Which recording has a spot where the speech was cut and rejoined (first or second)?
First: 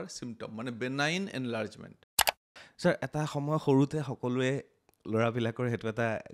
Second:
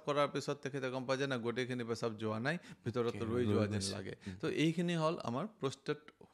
first